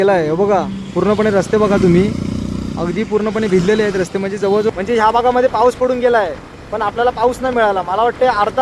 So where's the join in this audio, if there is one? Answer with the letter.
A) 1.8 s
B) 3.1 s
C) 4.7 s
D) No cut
C